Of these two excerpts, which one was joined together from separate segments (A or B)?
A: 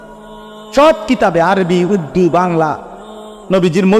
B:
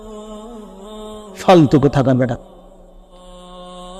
B